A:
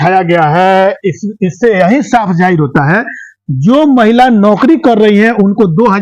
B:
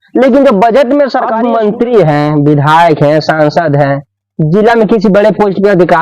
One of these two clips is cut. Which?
B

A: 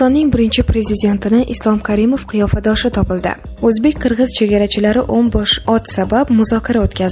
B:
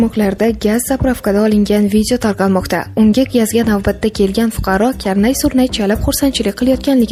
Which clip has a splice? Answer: A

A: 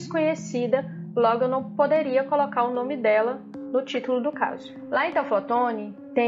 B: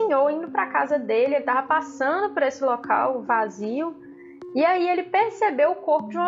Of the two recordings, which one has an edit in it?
A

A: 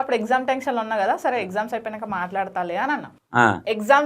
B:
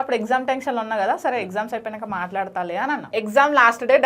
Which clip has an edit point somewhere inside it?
B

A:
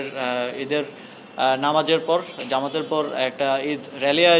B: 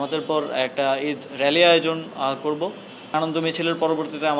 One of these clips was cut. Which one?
B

